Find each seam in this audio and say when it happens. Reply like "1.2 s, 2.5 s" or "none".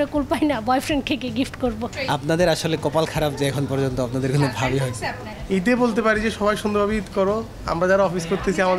1.9 s, 5.3 s